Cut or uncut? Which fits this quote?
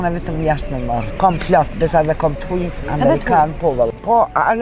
cut